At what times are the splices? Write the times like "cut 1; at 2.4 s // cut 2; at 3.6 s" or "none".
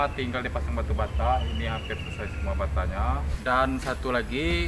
cut 1; at 3.3 s

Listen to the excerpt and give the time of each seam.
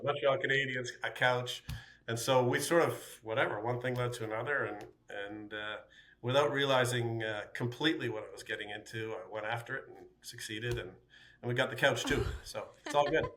none

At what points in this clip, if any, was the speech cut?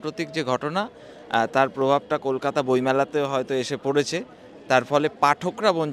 none

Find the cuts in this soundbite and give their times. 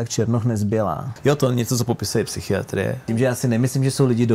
cut 1; at 1.1 s // cut 2; at 3.0 s

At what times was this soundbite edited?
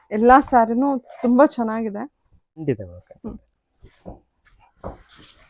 cut 1; at 2.6 s

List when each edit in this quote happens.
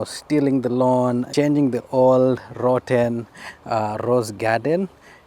cut 1; at 1.3 s

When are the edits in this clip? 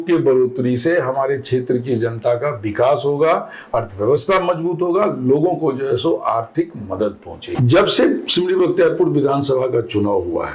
cut 1; at 7.6 s

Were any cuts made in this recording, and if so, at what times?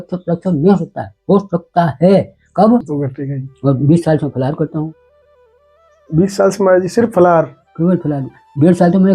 cut 1; at 2.9 s

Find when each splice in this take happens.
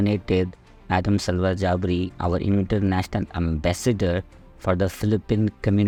none

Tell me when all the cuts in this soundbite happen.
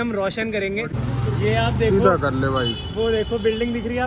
cut 1; at 0.9 s

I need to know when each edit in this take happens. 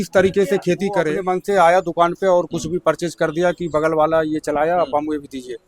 cut 1; at 1.2 s

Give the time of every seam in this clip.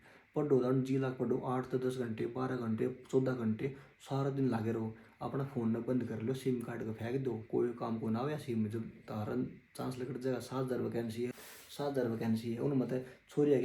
cut 1; at 11.3 s

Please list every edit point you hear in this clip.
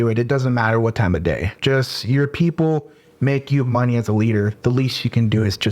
cut 1; at 1.5 s

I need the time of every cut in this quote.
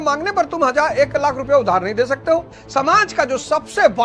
cut 1; at 2.6 s

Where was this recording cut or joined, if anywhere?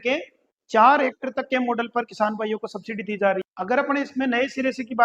cut 1; at 3.5 s

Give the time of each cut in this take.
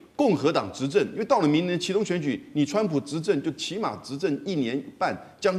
none

